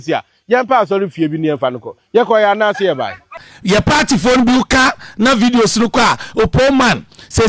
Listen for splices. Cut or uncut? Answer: cut